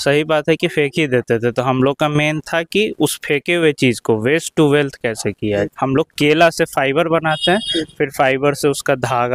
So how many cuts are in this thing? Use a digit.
1